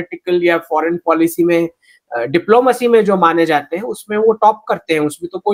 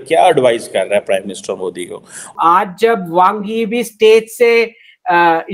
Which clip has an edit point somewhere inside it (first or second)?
second